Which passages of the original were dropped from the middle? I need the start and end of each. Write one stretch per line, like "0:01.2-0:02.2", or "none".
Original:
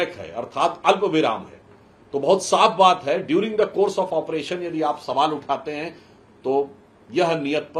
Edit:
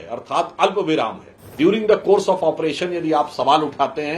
0:01.8-0:03.2